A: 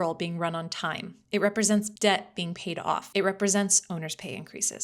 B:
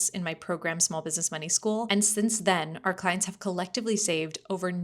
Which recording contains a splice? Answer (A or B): B